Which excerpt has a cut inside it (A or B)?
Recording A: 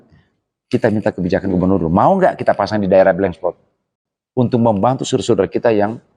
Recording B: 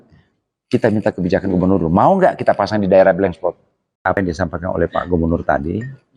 B